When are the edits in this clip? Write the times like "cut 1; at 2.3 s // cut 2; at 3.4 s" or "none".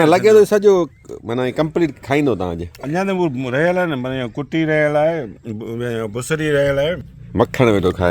cut 1; at 7.1 s